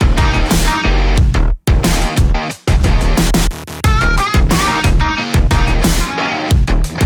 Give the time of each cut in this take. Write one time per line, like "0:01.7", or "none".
none